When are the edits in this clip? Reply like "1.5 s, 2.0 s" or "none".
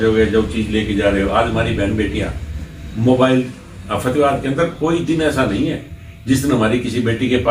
none